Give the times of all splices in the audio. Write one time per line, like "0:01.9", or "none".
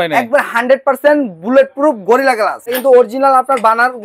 0:02.7